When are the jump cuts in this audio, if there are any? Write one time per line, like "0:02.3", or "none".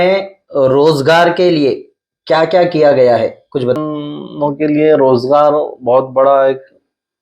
0:03.8